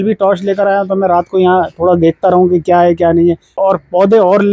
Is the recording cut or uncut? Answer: cut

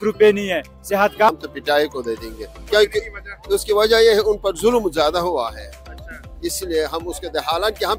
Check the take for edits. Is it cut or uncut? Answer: cut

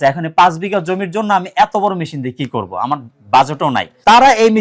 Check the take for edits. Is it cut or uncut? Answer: uncut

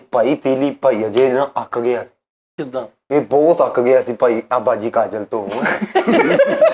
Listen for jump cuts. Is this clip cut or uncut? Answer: uncut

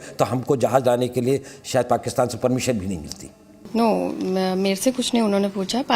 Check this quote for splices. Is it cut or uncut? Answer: cut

